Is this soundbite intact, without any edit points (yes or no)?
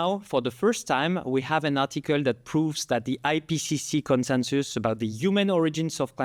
yes